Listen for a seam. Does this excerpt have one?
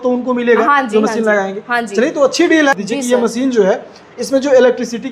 yes; 1 cut; at 2.7 s

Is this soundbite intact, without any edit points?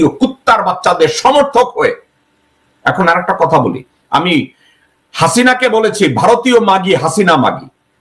yes; 0 cuts

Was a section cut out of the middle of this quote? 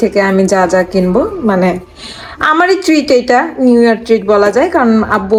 no; 0 cuts

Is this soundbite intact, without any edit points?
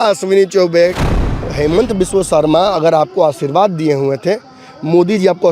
no; 1 cut; at 1.0 s

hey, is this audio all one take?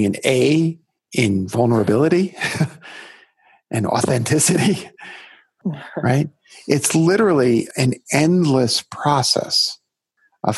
no; 2 cuts; at 5.5 s, 7.7 s

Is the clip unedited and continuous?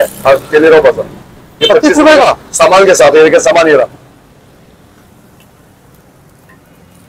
yes; 0 cuts

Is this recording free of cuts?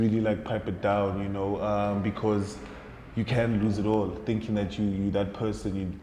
yes; 0 cuts

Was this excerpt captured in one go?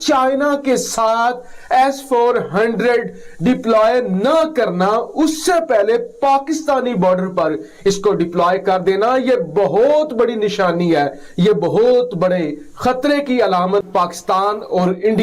no; 1 cut; at 13.9 s

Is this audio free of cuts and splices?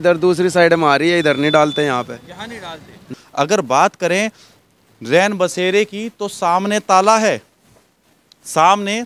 no; 1 cut; at 3.2 s

